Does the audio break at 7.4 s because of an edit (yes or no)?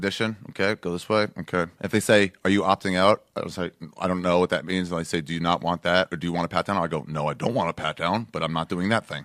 yes